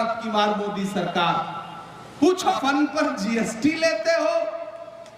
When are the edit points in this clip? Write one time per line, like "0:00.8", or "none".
0:02.5